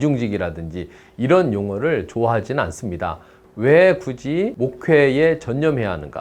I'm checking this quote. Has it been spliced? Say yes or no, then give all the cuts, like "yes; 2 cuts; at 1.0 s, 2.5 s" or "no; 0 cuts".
yes; 2 cuts; at 3.3 s, 4.6 s